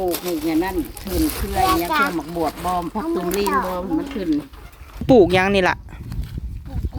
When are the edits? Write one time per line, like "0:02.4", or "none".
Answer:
0:05.0